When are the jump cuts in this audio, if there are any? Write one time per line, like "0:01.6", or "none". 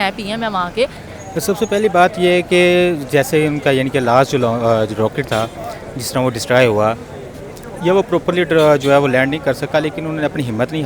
0:01.0